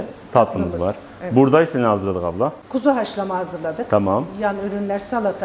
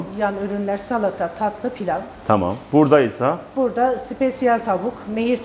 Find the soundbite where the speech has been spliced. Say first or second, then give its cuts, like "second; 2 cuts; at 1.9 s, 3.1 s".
first; 1 cut; at 2.6 s